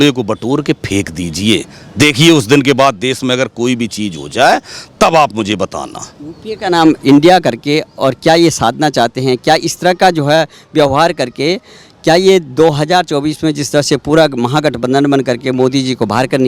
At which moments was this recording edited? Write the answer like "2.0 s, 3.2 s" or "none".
none